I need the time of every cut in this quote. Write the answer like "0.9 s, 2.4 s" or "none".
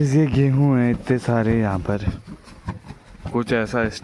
none

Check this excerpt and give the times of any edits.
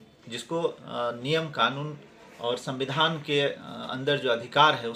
none

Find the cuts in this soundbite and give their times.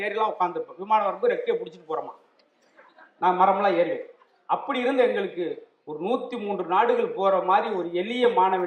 none

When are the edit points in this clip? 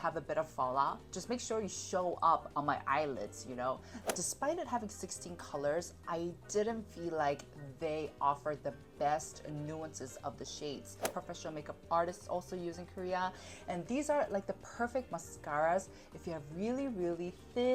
4.0 s, 11.1 s

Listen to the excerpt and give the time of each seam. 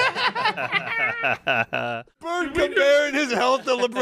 2.4 s

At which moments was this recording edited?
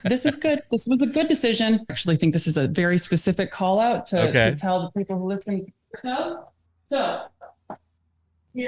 2.0 s

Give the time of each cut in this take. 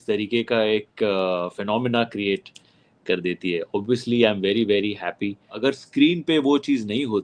5.5 s

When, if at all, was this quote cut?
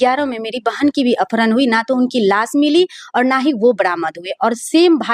none

